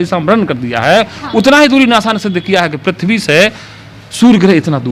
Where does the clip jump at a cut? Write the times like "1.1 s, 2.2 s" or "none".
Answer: none